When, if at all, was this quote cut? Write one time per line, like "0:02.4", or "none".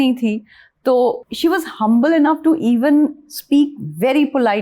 0:01.3